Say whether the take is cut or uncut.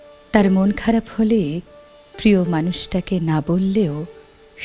uncut